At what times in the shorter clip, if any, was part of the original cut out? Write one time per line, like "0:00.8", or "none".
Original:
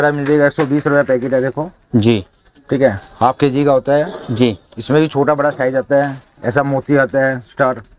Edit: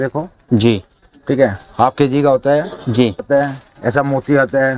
0:03.2